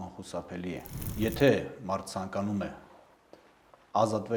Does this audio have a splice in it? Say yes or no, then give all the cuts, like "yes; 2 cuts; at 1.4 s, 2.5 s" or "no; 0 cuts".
yes; 1 cut; at 1.0 s